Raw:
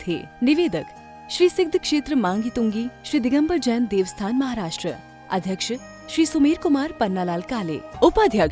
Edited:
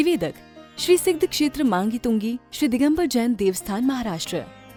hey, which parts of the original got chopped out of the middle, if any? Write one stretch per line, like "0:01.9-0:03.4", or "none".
none